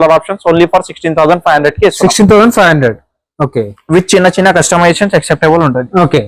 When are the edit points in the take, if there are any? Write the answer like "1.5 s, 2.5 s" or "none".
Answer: none